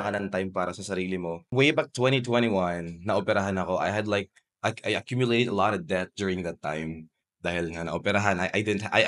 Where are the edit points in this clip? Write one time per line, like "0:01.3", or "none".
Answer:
0:01.4

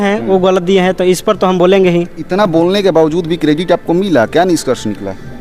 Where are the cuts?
none

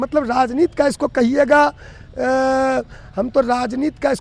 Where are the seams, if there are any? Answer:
none

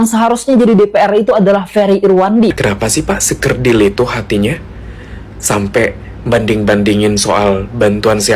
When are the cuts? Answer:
0:02.6

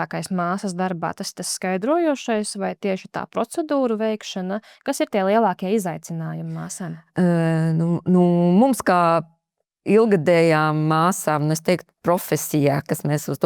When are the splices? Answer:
none

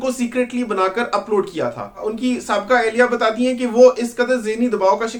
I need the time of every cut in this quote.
none

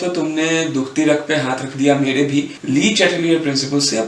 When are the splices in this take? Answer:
0:02.6

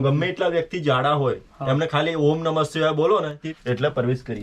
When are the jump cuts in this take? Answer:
0:03.4

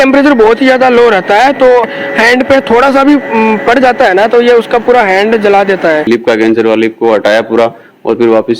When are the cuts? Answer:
0:01.8
0:06.1

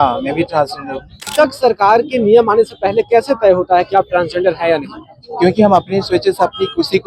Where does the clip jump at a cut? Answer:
0:01.3

